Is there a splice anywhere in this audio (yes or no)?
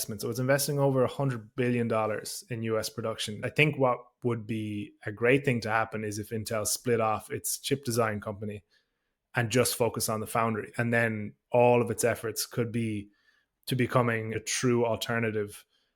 yes